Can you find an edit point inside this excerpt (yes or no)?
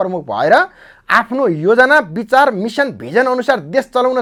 no